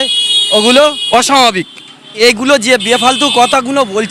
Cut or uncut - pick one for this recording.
cut